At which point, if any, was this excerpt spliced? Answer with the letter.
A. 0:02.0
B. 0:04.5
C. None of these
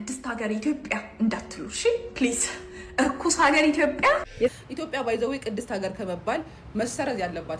B